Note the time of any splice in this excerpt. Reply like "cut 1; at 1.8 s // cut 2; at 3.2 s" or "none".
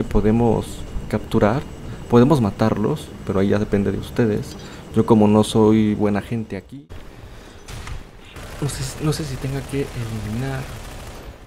cut 1; at 6.5 s

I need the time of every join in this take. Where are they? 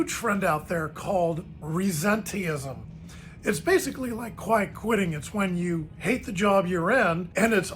none

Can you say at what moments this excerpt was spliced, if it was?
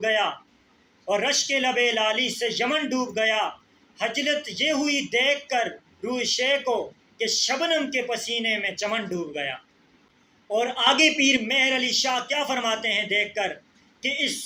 none

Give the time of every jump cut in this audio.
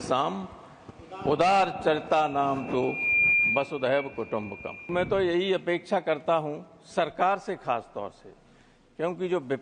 cut 1; at 4.9 s

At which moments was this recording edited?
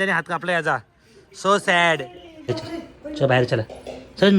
cut 1; at 2.5 s

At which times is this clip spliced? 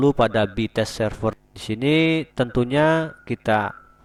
none

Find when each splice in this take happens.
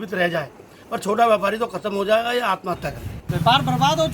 cut 1; at 3.1 s

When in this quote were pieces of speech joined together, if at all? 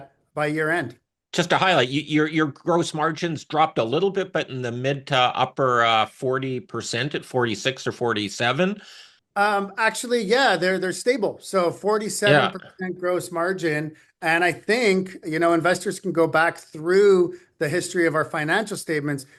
none

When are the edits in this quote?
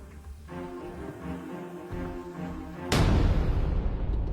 none

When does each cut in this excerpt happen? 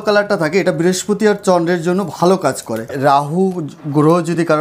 cut 1; at 2.9 s

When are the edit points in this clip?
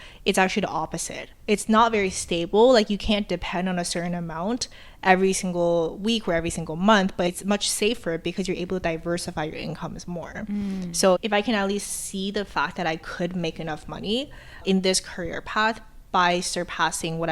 cut 1; at 11.2 s

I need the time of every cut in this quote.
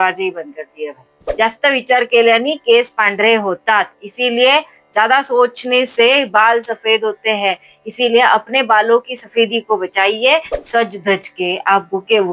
cut 1; at 1.3 s // cut 2; at 10.5 s

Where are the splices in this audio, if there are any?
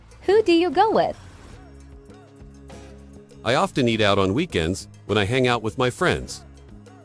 none

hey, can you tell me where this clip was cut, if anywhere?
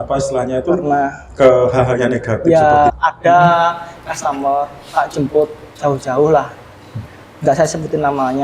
cut 1; at 2.9 s

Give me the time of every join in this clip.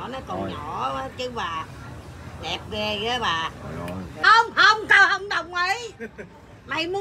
cut 1; at 4.2 s

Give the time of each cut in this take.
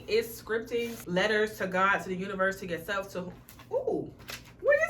cut 1; at 1.0 s

